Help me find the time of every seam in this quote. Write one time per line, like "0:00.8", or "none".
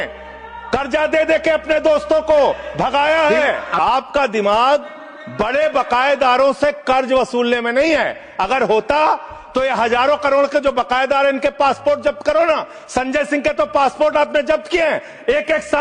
none